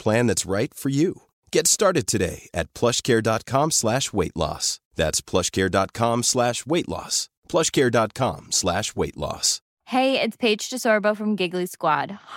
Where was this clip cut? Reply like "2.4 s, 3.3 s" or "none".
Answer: 9.5 s